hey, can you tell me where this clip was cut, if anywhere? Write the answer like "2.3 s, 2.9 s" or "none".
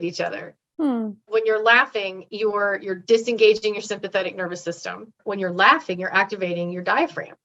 1.3 s, 5.2 s